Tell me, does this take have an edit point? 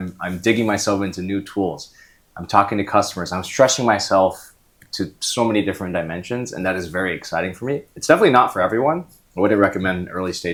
no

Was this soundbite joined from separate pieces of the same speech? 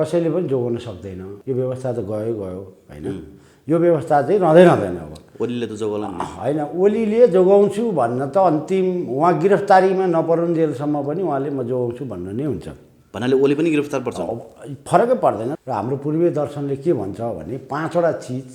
yes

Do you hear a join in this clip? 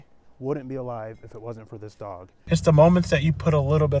yes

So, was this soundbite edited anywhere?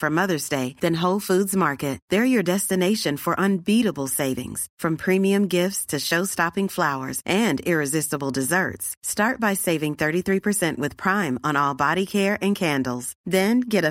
no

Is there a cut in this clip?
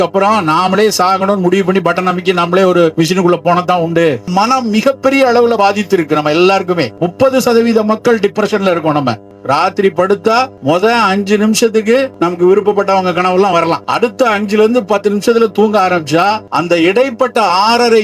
yes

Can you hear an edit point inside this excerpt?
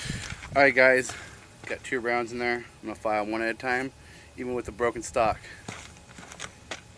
no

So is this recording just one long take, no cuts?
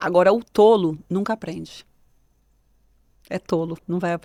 yes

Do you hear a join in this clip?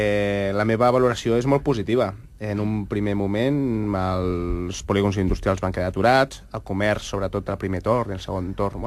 yes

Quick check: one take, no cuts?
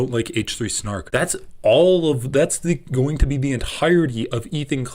no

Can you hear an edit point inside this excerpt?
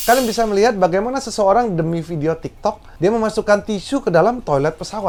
no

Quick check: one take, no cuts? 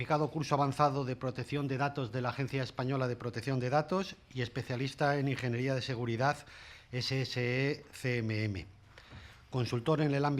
no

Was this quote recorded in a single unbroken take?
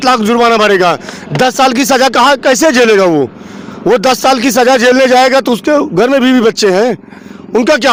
yes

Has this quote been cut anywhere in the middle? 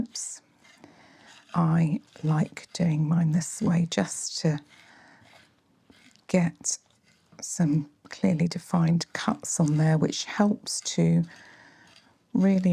yes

